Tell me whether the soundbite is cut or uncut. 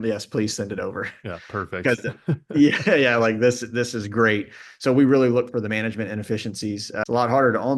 cut